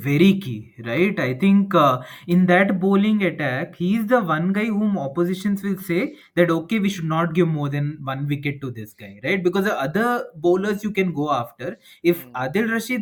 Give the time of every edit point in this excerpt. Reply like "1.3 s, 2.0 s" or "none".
none